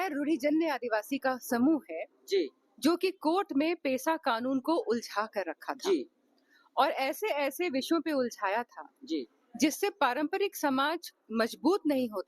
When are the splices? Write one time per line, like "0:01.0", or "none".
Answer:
none

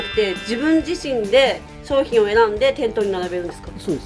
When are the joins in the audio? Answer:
none

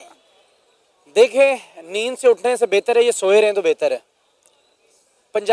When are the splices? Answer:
none

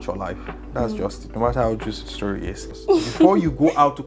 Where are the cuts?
0:02.6

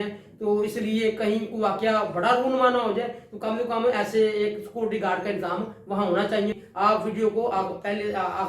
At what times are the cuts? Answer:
0:06.6

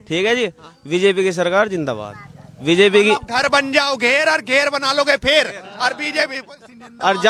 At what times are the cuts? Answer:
none

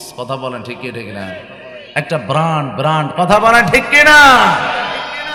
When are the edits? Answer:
none

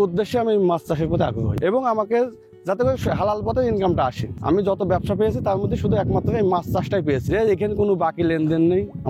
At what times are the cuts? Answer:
0:01.5
0:04.3

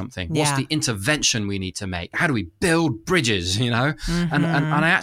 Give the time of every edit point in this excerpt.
0:02.2

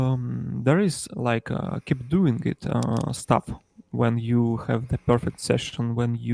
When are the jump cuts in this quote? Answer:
none

